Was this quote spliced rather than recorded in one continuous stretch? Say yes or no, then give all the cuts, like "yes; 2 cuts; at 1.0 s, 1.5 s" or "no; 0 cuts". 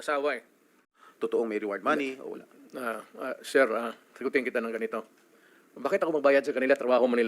yes; 1 cut; at 1.0 s